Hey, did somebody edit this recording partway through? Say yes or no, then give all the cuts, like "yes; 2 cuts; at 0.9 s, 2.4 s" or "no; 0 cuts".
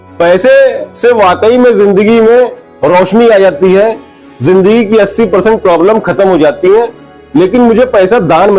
no; 0 cuts